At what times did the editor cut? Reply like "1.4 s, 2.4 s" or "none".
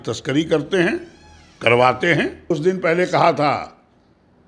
2.5 s

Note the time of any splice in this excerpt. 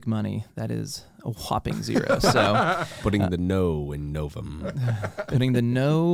none

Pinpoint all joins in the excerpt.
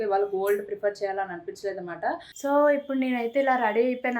2.3 s

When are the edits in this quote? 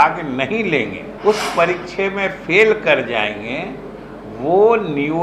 1.1 s

